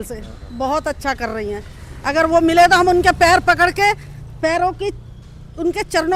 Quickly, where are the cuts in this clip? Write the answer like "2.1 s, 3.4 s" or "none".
none

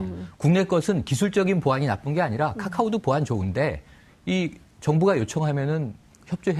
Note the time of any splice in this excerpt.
1.5 s

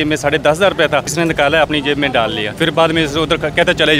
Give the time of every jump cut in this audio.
1.1 s, 2.5 s

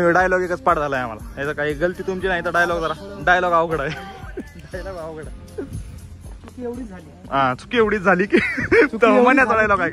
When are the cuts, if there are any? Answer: none

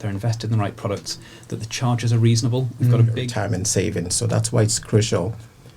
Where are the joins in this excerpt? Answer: 3.2 s

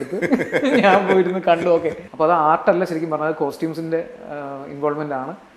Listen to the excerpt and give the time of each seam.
2.0 s

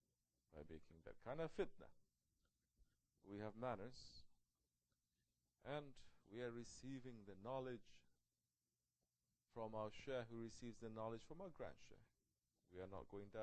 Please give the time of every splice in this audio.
4.0 s

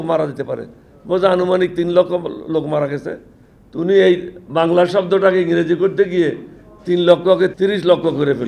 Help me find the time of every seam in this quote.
7.5 s

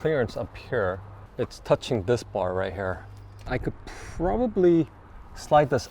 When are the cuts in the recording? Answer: 1.2 s, 3.4 s

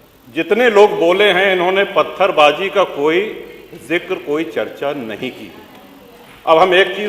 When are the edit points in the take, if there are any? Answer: none

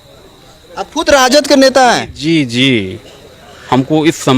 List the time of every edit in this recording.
none

